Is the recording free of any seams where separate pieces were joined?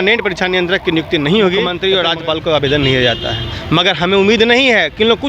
no; 1 cut; at 1.7 s

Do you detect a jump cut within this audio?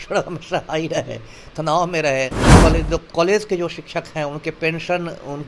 yes; 1 cut; at 2.6 s

